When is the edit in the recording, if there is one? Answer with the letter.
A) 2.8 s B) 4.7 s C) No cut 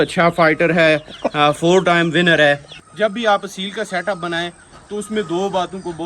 A